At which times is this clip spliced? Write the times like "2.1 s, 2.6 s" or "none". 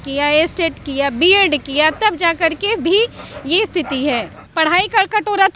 4.4 s